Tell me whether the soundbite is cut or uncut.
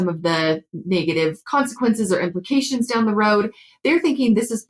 uncut